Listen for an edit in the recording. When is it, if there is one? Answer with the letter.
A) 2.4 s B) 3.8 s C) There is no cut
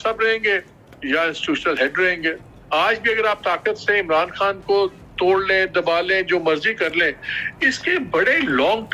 A